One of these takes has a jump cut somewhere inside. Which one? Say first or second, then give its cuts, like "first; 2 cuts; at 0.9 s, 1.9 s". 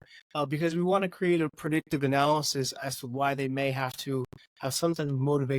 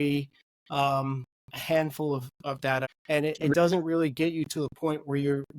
second; 1 cut; at 2.8 s